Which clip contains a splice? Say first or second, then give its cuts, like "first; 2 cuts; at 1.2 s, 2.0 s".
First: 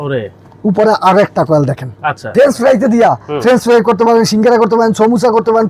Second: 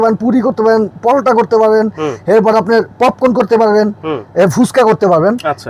first; 1 cut; at 2.3 s